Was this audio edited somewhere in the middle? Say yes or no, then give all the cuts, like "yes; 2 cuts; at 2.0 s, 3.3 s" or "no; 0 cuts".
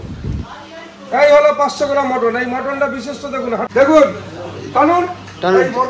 yes; 1 cut; at 3.7 s